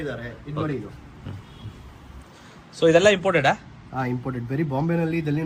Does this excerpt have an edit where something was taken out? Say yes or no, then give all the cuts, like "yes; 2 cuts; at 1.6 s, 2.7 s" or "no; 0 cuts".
no; 0 cuts